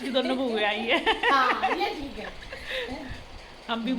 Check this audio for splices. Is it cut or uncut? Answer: uncut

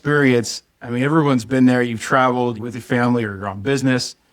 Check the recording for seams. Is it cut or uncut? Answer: cut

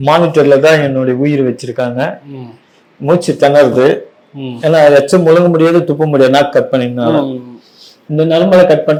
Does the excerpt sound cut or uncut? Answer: uncut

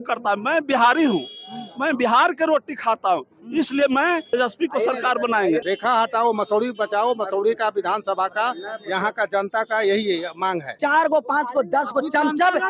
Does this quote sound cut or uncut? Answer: cut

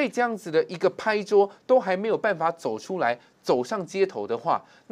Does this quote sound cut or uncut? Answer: uncut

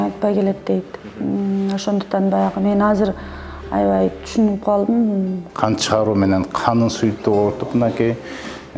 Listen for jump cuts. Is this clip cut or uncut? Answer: cut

